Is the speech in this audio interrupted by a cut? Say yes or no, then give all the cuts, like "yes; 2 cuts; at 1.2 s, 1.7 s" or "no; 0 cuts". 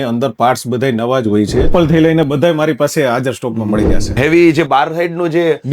yes; 2 cuts; at 1.7 s, 4.1 s